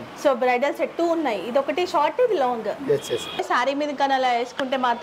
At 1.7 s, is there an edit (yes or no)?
no